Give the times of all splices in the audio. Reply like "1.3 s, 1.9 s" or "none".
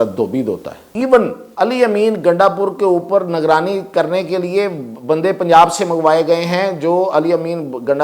0.9 s, 1.4 s